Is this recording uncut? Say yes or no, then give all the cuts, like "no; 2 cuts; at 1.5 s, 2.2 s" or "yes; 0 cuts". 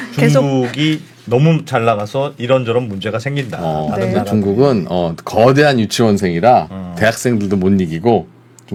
yes; 0 cuts